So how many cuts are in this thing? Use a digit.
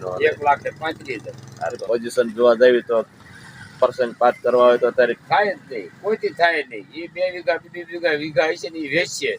1